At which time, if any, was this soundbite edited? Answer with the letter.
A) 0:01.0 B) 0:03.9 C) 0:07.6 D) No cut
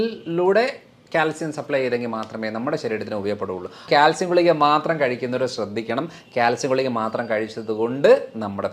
B